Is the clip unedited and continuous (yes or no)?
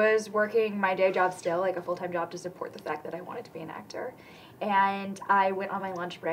yes